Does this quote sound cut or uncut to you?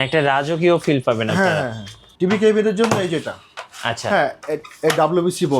cut